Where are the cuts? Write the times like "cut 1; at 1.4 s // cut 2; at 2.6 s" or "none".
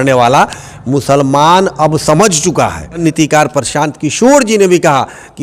cut 1; at 3.0 s